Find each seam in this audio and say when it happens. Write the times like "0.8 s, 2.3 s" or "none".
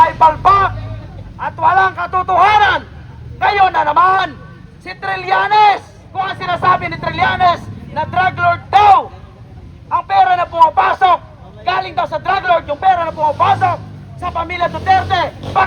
6.0 s